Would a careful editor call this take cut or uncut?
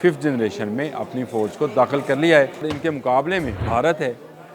cut